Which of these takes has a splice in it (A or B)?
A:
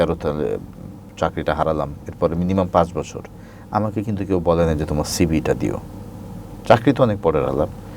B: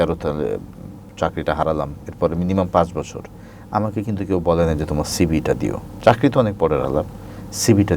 B